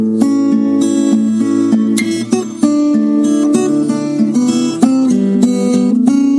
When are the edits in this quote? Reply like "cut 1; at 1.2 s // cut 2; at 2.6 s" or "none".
none